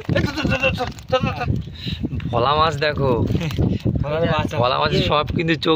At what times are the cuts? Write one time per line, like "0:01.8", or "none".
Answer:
0:01.4